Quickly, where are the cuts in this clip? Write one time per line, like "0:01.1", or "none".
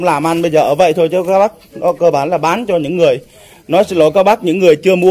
none